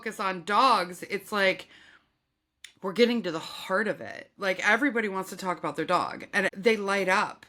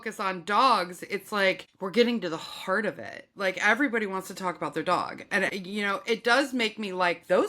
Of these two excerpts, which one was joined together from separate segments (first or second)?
second